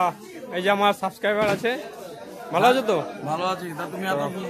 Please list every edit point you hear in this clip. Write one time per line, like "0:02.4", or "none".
none